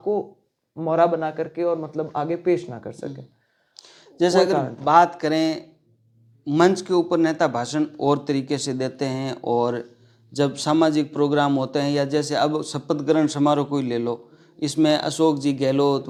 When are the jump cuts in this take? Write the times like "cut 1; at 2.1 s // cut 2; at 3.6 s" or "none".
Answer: none